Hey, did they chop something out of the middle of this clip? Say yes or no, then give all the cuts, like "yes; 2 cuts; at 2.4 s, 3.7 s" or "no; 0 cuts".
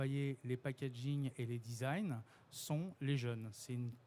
no; 0 cuts